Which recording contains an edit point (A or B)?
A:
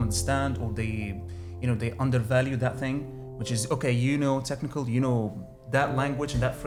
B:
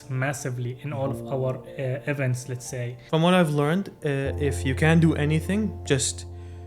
B